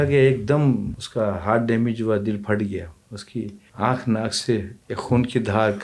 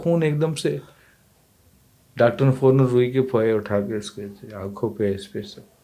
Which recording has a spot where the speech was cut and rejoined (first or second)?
first